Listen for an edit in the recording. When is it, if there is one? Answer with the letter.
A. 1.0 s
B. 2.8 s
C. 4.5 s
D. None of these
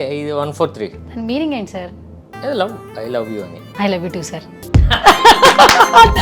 A